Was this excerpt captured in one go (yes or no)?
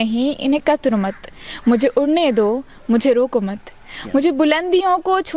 yes